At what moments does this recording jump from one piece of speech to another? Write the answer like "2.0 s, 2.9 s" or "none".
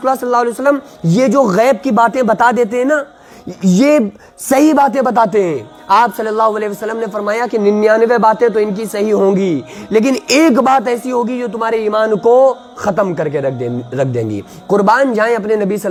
none